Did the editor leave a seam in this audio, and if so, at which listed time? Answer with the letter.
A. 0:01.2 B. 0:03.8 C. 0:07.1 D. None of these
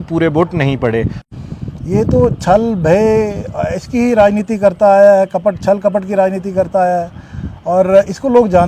A